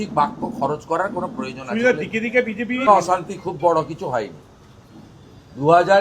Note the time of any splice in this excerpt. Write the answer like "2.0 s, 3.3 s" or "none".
2.9 s